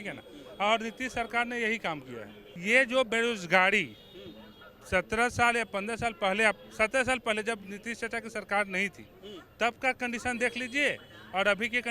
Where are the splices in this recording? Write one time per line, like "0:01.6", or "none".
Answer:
0:02.4

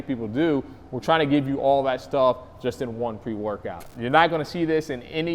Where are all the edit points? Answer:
0:03.8

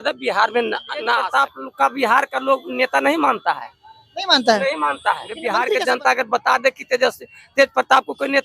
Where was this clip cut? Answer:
0:01.2
0:05.5

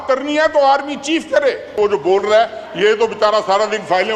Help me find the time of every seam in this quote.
0:01.8

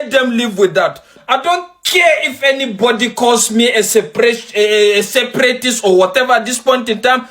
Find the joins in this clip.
0:01.2

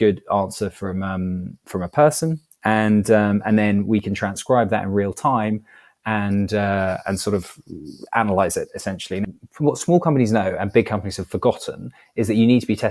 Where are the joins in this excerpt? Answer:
0:09.2

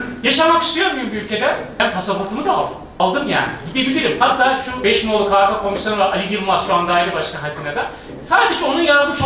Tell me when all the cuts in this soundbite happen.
0:01.8
0:03.0
0:04.8

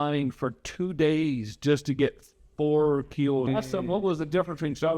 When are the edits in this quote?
0:03.5

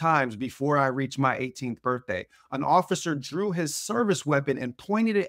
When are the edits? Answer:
none

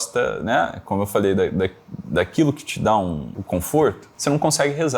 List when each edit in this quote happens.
0:03.3
0:04.1

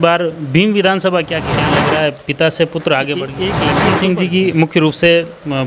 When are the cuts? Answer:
0:01.8
0:03.7

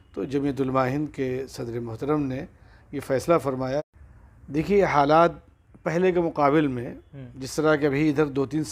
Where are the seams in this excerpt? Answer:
0:03.8

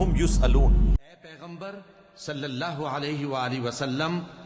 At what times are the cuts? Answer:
0:01.0

